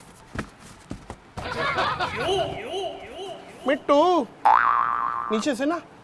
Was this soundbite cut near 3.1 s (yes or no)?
yes